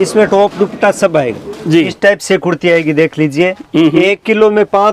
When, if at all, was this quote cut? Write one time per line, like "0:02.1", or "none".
0:01.9